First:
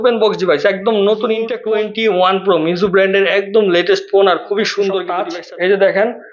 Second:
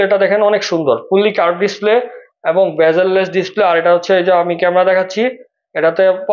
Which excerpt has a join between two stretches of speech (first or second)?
first